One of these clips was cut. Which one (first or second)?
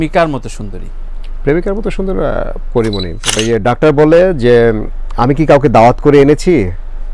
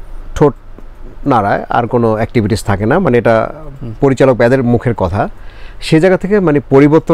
first